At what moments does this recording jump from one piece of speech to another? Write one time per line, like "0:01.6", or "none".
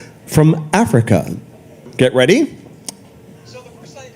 0:01.9